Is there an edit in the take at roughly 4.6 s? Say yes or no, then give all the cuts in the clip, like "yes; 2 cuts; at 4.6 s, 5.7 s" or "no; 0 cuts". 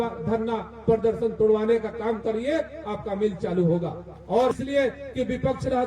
yes; 1 cut; at 4.6 s